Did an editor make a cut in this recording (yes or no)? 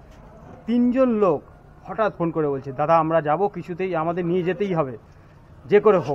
no